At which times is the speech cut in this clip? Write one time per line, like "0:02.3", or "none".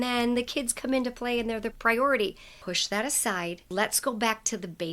0:02.5
0:03.7